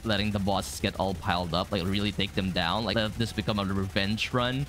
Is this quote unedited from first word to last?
no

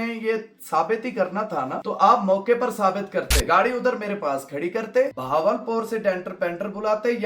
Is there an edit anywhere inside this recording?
yes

